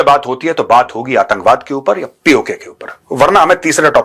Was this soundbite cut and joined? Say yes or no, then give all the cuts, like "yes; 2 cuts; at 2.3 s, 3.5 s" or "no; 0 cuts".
no; 0 cuts